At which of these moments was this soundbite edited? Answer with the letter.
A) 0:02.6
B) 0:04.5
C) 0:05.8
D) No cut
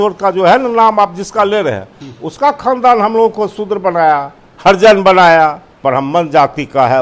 C